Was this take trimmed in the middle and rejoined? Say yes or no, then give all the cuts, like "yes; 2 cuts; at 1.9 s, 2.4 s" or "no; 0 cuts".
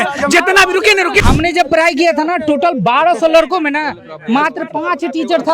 yes; 1 cut; at 1.2 s